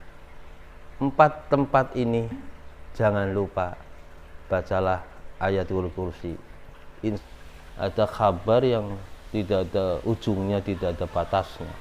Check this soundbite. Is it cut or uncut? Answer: cut